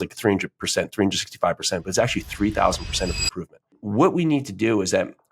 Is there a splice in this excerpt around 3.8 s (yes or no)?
yes